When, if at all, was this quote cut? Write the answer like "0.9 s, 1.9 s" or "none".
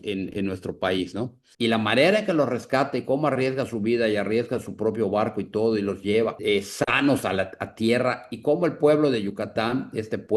1.4 s, 6.4 s